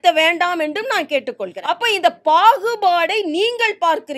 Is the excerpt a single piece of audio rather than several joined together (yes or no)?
no